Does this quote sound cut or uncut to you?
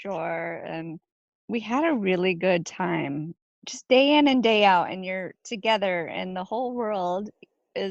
cut